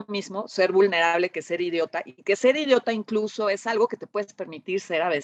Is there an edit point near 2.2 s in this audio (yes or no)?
no